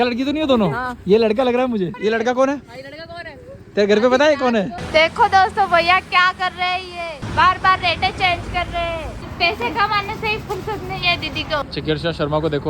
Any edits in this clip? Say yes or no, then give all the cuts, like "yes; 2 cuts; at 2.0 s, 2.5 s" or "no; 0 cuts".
yes; 4 cuts; at 1.9 s, 4.8 s, 9.1 s, 11.6 s